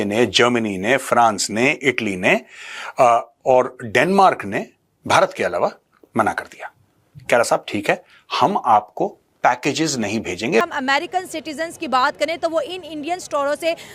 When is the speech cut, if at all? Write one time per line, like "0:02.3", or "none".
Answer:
0:10.6